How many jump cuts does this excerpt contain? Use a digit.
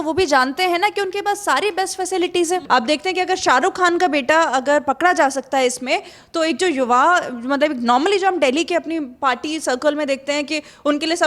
2